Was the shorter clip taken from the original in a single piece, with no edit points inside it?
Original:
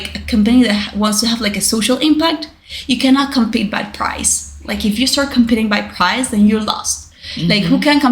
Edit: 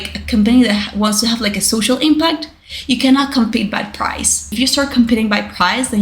no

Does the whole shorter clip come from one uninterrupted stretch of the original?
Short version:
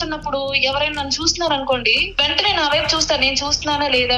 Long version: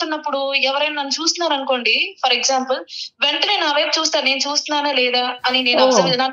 no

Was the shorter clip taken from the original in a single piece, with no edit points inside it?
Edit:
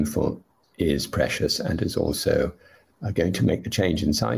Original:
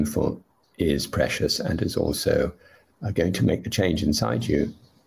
yes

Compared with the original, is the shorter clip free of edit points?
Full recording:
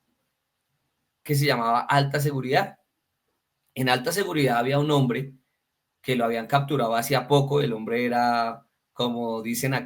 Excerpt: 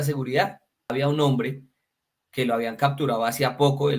no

